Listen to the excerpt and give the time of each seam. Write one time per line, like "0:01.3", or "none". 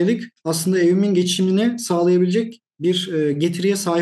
none